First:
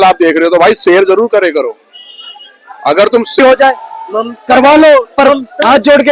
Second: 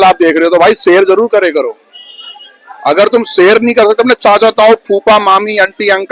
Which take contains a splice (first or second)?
first